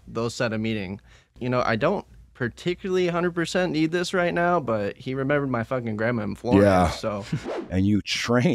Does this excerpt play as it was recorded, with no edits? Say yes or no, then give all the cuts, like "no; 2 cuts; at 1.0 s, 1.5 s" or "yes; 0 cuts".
no; 2 cuts; at 1.3 s, 7.4 s